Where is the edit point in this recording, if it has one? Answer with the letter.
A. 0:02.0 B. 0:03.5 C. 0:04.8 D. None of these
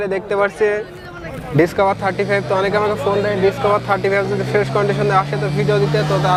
D